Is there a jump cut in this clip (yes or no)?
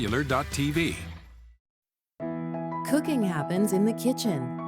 yes